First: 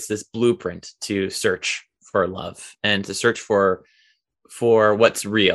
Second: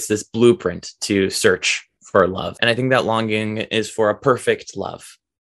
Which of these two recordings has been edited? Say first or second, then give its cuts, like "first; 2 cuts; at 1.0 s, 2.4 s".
second; 1 cut; at 2.5 s